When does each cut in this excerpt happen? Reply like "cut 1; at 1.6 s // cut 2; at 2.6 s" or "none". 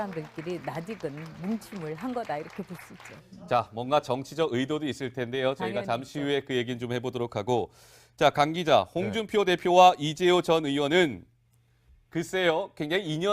cut 1; at 2.0 s